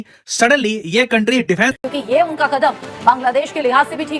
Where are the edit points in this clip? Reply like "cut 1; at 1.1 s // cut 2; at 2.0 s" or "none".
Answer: cut 1; at 1.8 s

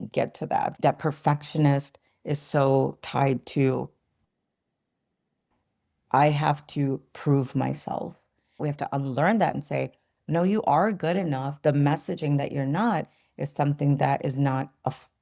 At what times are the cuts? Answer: cut 1; at 0.8 s // cut 2; at 8.6 s

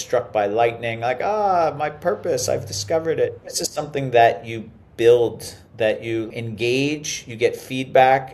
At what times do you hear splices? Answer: cut 1; at 3.7 s // cut 2; at 6.3 s

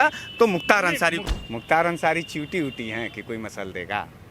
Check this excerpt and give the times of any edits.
cut 1; at 1.2 s

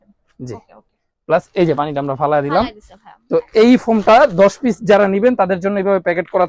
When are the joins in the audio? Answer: none

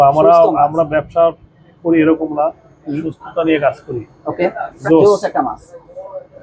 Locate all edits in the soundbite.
cut 1; at 4.7 s

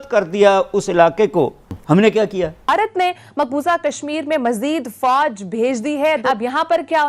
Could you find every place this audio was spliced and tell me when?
cut 1; at 1.8 s // cut 2; at 2.7 s // cut 3; at 6.2 s

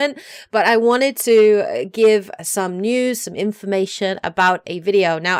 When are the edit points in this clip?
none

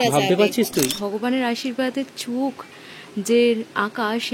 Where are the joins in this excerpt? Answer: cut 1; at 1.0 s

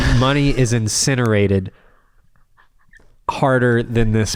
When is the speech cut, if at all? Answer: none

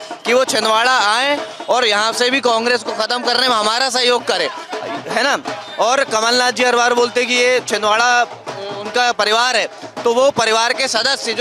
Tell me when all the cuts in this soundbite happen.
none

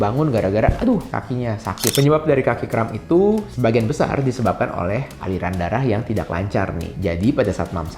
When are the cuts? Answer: cut 1; at 1.9 s

